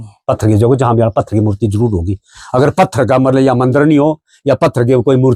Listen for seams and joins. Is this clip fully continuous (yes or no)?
yes